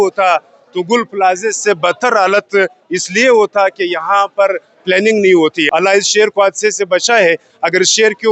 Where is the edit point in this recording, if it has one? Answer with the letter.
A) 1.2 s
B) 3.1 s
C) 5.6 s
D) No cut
C